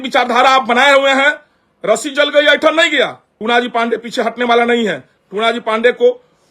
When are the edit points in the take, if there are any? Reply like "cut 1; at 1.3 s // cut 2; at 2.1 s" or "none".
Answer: cut 1; at 3.3 s